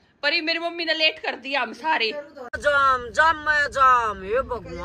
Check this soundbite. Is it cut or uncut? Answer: cut